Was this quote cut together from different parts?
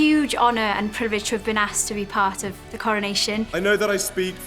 yes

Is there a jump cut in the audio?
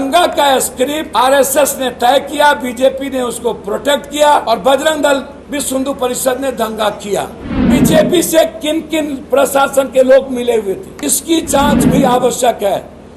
yes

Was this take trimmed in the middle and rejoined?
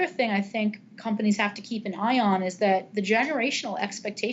no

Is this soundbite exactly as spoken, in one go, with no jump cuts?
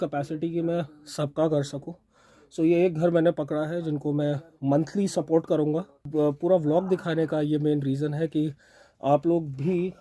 no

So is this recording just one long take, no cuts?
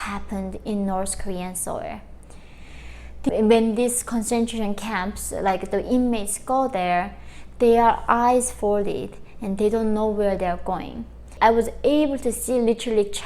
no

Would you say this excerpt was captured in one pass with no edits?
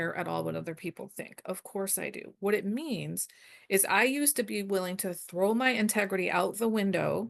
yes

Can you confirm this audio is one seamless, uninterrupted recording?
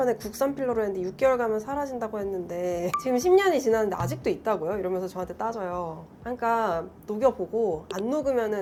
yes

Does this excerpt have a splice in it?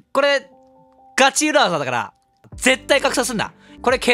yes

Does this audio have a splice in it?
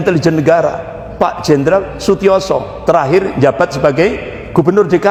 no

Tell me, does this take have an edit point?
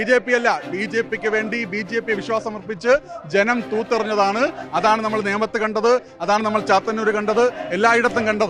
no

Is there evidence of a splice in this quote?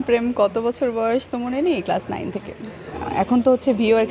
yes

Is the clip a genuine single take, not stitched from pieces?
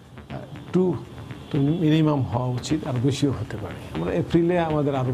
no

